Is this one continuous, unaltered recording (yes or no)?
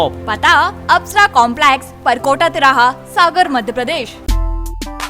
no